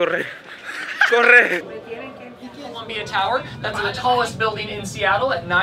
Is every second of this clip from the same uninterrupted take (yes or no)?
no